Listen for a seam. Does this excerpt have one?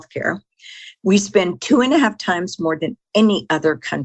no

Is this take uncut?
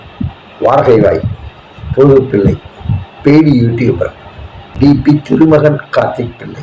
yes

